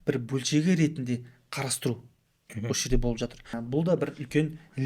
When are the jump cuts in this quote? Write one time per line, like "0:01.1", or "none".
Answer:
0:03.6